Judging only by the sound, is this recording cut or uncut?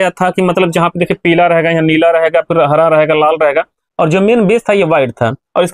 uncut